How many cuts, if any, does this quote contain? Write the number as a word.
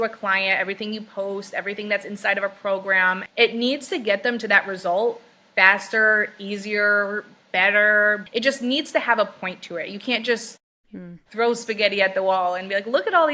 two